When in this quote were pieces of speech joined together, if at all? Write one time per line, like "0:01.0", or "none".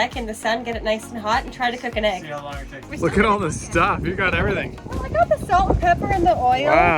0:02.8